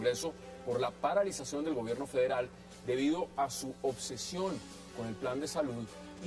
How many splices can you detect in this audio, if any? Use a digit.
1